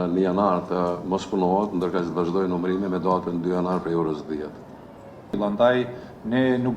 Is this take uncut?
no; 1 cut; at 5.1 s

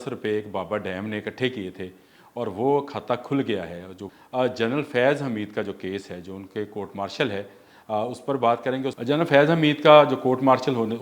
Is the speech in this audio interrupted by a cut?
yes; 2 cuts; at 4.0 s, 9.0 s

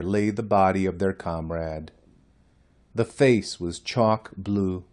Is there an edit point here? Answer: yes; 1 cut; at 1.0 s

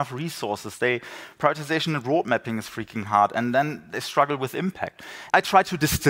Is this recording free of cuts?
no; 1 cut; at 5.1 s

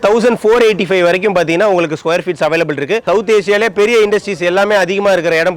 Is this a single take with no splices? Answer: no; 1 cut; at 3.0 s

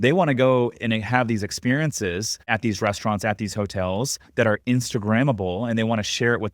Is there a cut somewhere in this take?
yes; 1 cut; at 2.4 s

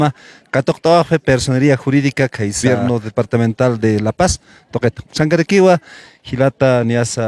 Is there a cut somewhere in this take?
yes; 1 cut; at 2.6 s

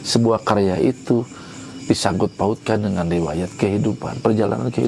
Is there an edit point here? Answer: no; 0 cuts

